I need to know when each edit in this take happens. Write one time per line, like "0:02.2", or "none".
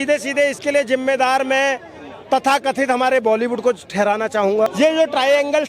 0:04.7